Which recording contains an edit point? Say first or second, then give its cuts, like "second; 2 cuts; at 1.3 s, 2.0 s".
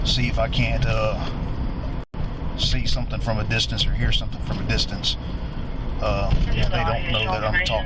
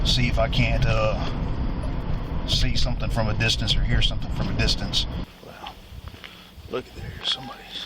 second; 2 cuts; at 2.0 s, 5.3 s